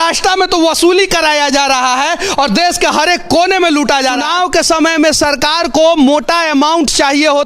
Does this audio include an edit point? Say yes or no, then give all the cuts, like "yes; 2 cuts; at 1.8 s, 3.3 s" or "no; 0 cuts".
yes; 1 cut; at 4.2 s